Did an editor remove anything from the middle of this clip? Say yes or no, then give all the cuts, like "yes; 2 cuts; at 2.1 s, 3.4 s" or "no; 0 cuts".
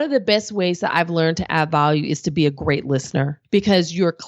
yes; 1 cut; at 3.4 s